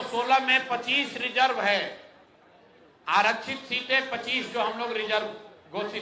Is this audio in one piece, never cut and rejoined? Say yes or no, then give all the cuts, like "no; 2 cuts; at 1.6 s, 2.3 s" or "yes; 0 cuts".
yes; 0 cuts